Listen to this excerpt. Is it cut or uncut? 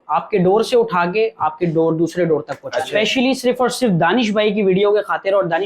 cut